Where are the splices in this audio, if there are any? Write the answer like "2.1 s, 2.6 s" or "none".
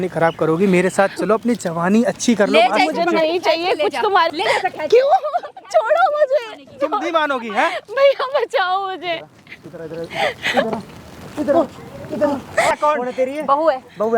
4.3 s, 12.7 s